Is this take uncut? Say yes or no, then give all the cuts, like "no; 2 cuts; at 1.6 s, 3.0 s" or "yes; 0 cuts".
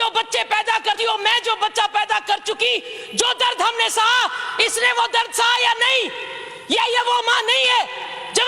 yes; 0 cuts